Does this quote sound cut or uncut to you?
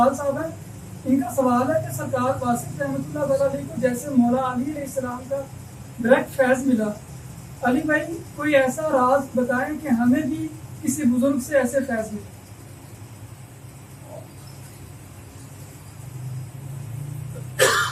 uncut